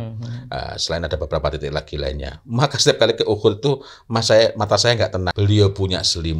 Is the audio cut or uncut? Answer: cut